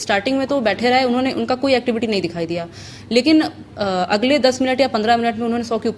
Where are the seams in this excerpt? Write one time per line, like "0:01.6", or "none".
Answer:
none